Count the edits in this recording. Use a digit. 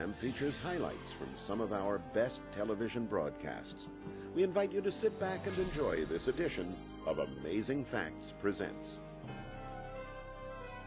1